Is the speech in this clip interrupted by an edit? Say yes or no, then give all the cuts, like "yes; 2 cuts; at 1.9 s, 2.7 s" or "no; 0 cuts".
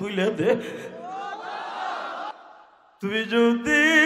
yes; 1 cut; at 2.3 s